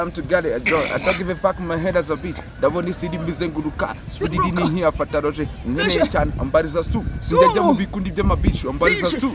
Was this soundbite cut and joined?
no; 0 cuts

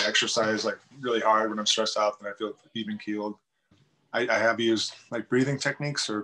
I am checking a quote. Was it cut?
yes; 1 cut; at 3.7 s

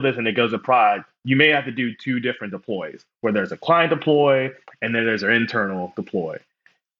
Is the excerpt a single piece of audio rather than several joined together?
yes; 0 cuts

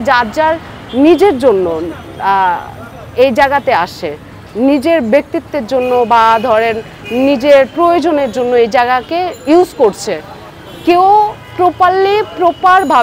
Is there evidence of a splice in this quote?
no; 0 cuts

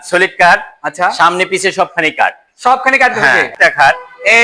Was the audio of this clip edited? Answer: yes; 1 cut; at 3.5 s

